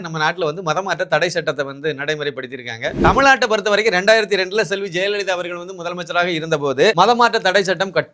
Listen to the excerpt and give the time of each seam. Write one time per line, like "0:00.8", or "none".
0:03.0
0:06.9